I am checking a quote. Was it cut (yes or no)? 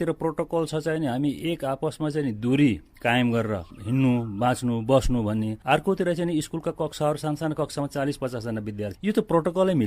yes